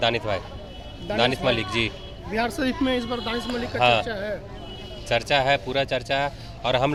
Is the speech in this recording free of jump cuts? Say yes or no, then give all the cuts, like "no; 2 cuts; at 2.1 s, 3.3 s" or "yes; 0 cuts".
yes; 0 cuts